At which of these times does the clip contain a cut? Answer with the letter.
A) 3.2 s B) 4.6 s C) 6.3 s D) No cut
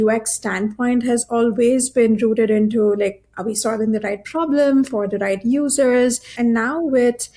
C